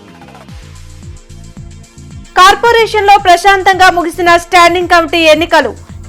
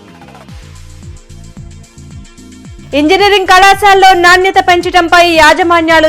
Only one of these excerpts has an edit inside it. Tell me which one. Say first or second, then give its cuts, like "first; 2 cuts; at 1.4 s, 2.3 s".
second; 1 cut; at 2.2 s